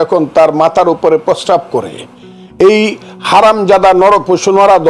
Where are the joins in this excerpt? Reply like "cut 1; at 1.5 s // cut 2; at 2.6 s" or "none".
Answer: none